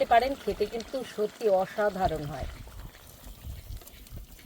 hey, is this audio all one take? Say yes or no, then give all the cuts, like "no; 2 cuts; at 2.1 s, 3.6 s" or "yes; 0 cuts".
no; 1 cut; at 2.5 s